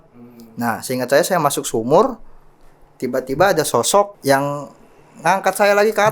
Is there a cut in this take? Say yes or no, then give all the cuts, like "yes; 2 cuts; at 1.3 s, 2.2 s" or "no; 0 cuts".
yes; 1 cut; at 4.2 s